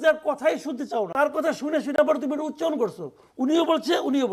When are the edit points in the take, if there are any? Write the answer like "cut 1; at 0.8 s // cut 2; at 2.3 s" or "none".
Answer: cut 1; at 1.1 s